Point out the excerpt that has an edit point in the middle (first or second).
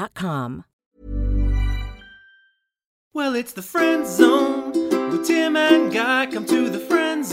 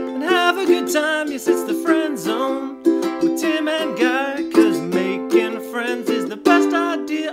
first